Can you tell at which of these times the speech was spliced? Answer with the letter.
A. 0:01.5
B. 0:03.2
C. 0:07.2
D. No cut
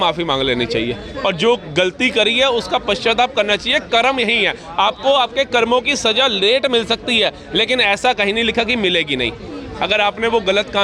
D